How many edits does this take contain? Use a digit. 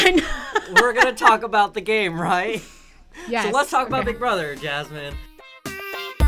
1